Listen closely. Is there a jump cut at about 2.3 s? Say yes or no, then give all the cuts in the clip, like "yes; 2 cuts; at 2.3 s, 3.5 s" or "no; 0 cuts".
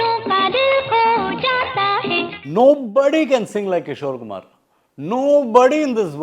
yes; 1 cut; at 2.3 s